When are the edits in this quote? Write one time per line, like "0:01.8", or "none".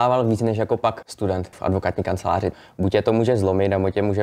0:01.3
0:02.5